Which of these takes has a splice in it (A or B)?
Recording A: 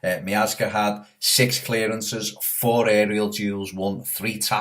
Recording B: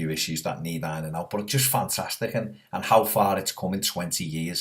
A